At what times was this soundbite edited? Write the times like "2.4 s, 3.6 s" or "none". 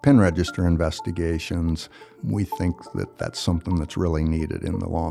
2.1 s

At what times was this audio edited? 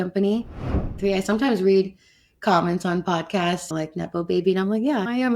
1.0 s

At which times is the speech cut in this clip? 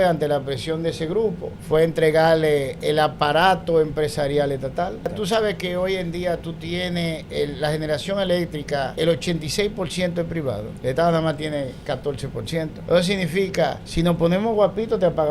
1.5 s, 2.8 s, 5.1 s, 8.9 s, 10.7 s, 12.8 s, 13.8 s

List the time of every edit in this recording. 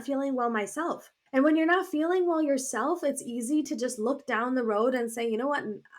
1.1 s

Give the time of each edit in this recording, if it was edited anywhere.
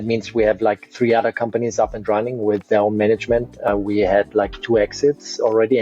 3.7 s

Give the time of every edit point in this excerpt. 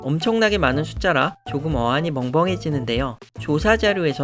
3.3 s

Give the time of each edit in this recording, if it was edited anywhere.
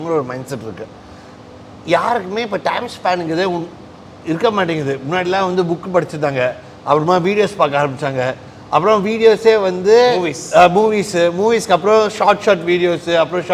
none

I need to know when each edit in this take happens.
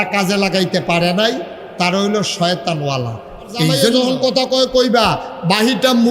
3.8 s

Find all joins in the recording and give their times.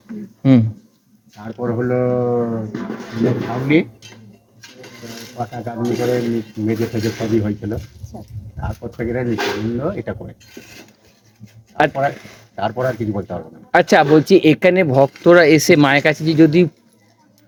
none

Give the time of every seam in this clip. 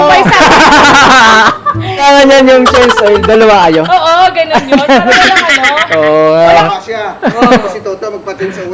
2.0 s, 6.7 s

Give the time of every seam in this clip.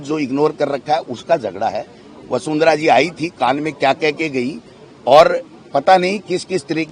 none

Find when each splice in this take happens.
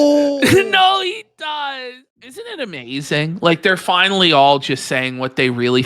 2.5 s

